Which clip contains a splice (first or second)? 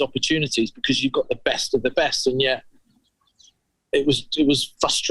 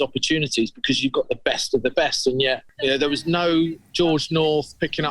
second